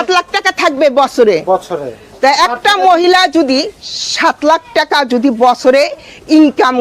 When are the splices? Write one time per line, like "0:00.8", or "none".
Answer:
none